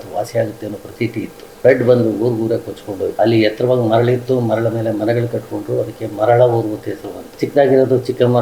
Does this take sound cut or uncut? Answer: cut